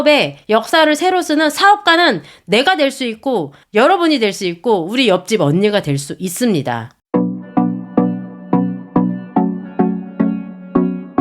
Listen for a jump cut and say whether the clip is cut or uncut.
cut